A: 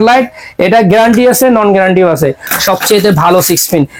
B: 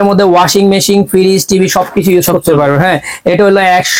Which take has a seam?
A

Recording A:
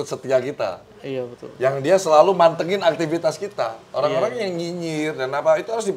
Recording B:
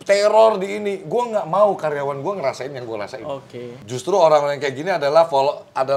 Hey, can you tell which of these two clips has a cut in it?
B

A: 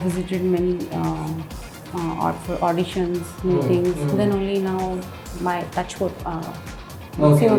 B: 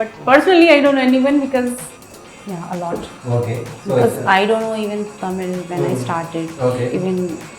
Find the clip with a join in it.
B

